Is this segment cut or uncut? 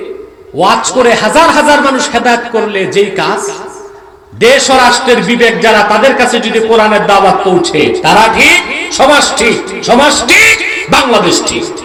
uncut